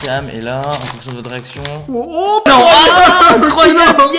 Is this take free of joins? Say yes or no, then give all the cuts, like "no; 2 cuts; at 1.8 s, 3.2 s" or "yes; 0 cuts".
no; 1 cut; at 2.5 s